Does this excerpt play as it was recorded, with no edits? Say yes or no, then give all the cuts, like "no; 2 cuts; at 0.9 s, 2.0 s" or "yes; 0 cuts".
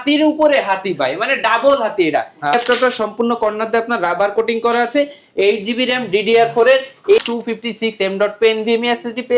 no; 2 cuts; at 2.5 s, 7.2 s